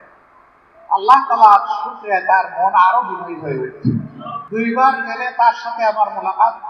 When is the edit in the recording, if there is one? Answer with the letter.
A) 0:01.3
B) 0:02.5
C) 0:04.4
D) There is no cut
C